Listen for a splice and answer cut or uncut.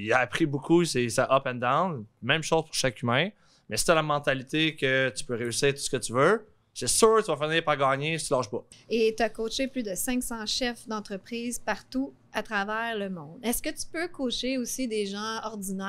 cut